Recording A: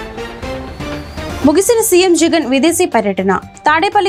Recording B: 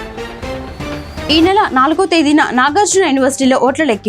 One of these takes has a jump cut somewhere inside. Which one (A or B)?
B